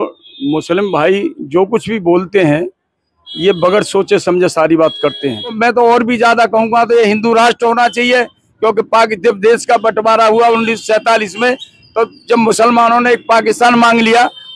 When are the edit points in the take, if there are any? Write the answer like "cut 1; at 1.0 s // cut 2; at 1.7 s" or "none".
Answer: cut 1; at 5.6 s

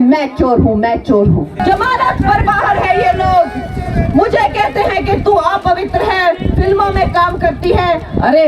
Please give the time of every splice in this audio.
cut 1; at 1.5 s

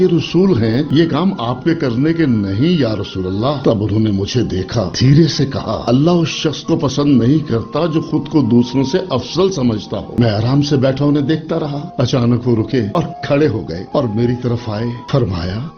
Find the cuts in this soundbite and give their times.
none

